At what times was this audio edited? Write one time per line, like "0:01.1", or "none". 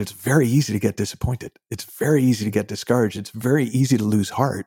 none